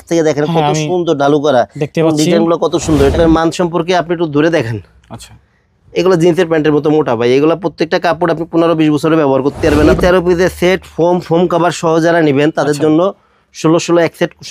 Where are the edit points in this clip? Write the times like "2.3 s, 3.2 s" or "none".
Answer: 3.1 s, 9.7 s